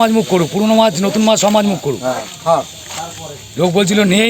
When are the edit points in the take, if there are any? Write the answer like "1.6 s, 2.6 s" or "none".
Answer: none